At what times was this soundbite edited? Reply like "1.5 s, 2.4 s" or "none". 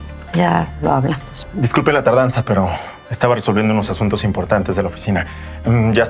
1.4 s